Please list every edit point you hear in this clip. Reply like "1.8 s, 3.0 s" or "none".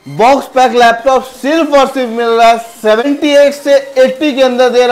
3.0 s